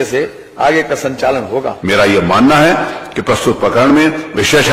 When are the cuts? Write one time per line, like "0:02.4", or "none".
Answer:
0:01.7